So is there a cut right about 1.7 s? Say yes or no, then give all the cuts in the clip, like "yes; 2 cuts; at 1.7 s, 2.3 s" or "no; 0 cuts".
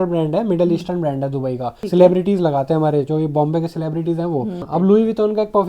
yes; 2 cuts; at 1.7 s, 4.7 s